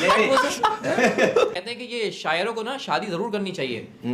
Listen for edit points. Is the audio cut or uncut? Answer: cut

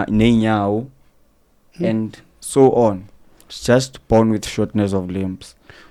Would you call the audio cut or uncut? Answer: uncut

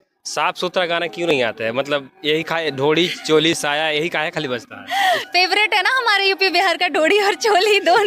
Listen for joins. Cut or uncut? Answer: cut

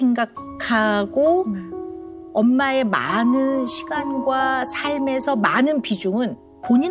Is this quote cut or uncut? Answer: uncut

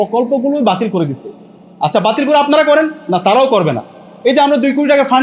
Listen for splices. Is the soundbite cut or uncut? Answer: uncut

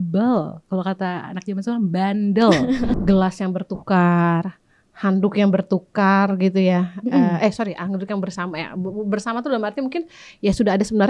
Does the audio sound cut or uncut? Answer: cut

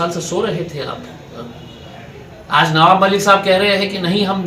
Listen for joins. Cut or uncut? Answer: uncut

